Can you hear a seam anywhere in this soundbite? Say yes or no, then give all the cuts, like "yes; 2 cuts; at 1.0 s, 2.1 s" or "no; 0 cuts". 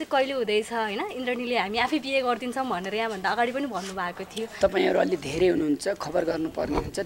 yes; 1 cut; at 4.5 s